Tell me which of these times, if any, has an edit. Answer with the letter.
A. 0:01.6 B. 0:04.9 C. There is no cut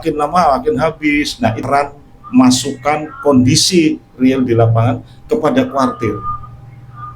A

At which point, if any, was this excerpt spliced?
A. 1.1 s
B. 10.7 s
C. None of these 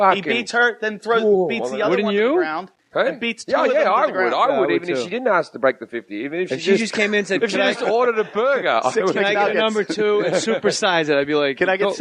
A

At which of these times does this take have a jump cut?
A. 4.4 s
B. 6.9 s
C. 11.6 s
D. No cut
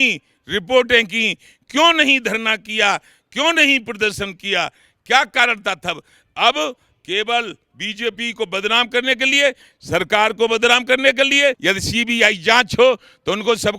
C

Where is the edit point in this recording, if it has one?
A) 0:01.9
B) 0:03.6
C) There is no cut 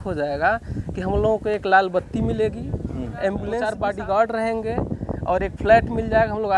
B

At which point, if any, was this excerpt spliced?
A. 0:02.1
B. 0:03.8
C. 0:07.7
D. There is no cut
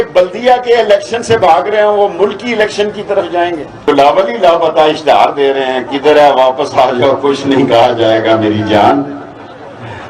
B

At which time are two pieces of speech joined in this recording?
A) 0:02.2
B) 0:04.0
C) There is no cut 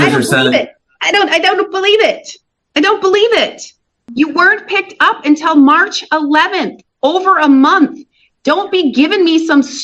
B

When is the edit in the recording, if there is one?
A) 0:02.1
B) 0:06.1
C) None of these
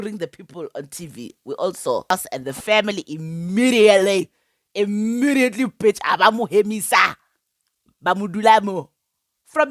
A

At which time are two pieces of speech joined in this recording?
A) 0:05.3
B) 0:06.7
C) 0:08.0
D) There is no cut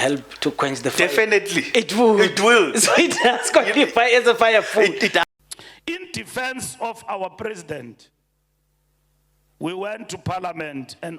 A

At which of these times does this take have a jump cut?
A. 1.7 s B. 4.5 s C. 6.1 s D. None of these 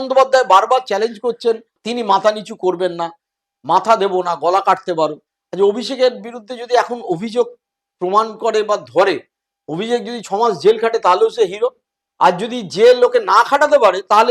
A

